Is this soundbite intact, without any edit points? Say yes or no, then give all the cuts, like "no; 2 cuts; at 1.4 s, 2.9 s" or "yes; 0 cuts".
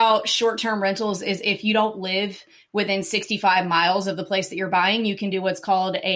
yes; 0 cuts